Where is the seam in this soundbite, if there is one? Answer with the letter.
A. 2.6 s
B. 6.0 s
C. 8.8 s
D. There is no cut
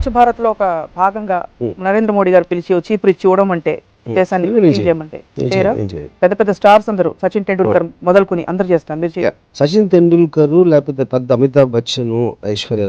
B